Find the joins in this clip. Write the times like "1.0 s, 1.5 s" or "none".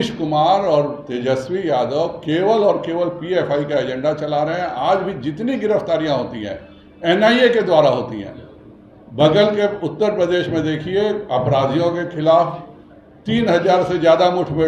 none